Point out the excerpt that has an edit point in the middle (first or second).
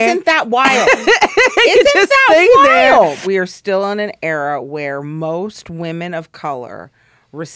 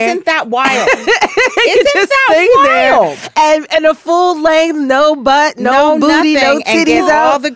first